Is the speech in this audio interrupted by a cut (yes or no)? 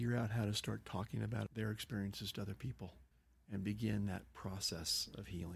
no